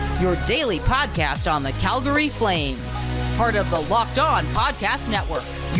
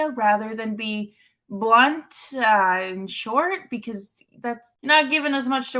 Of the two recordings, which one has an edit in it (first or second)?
second